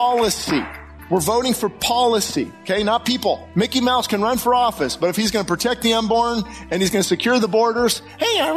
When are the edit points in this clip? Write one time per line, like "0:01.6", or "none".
0:02.6
0:03.5